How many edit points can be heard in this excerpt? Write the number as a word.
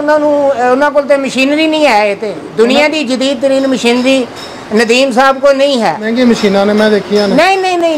one